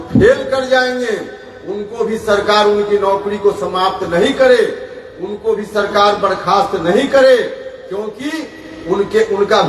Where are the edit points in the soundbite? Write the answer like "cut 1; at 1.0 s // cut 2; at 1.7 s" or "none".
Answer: none